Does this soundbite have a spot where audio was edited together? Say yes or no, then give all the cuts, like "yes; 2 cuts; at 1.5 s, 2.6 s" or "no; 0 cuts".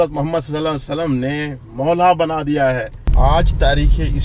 yes; 1 cut; at 3.1 s